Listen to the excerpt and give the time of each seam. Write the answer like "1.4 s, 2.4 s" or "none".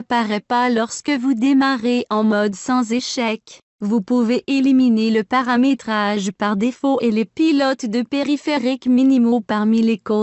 9.3 s